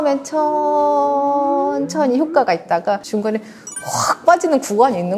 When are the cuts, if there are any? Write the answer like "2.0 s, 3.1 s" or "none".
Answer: 3.0 s